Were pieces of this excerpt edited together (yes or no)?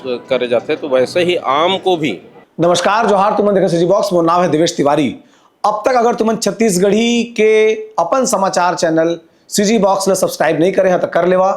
yes